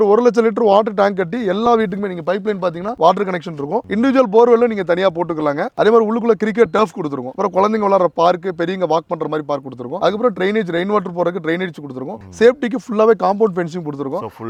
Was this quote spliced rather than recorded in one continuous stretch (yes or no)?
no